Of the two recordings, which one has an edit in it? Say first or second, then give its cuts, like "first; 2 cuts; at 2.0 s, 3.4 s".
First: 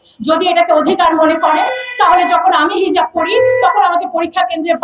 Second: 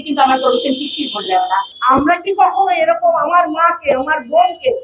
second; 1 cut; at 1.7 s